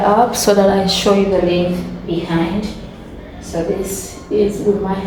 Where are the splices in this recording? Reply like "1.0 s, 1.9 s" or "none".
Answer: none